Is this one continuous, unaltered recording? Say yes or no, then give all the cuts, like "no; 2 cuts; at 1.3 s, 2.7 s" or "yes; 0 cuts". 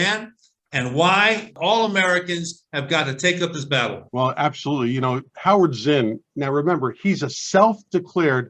no; 2 cuts; at 1.5 s, 4.0 s